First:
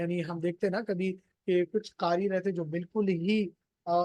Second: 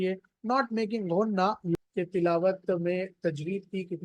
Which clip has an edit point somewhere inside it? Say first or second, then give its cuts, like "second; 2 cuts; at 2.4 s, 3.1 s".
second; 1 cut; at 1.7 s